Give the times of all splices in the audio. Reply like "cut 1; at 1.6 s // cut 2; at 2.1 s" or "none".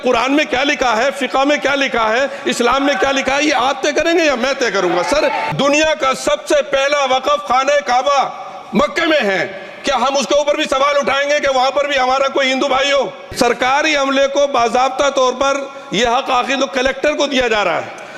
cut 1; at 5.5 s // cut 2; at 13.2 s